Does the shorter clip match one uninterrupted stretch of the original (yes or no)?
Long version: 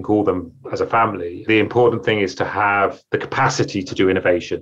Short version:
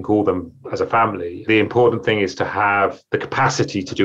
yes